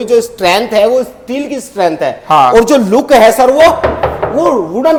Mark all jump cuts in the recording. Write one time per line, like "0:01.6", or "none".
none